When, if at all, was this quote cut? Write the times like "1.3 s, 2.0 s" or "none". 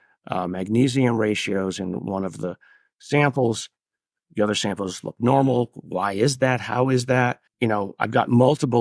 7.4 s